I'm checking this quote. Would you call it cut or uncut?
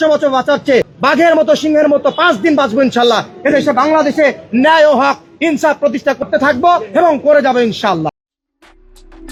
uncut